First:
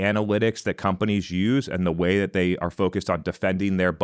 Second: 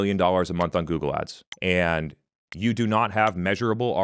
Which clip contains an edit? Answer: second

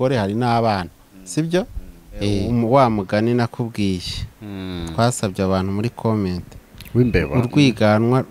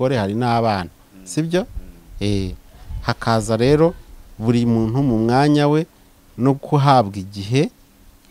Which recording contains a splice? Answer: first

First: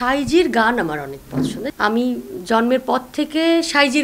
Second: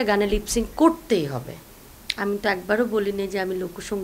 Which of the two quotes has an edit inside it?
first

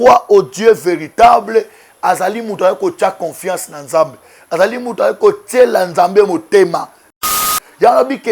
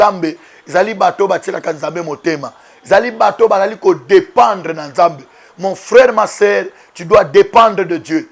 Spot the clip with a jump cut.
first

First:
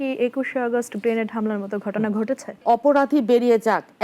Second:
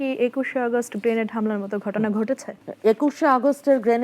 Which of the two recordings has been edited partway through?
first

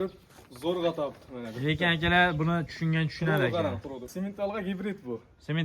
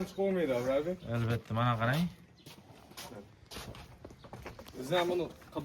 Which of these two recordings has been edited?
first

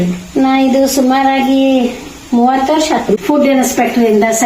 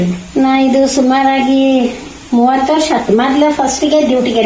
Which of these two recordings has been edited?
first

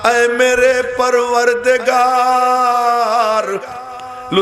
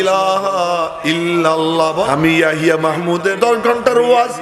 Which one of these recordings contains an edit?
second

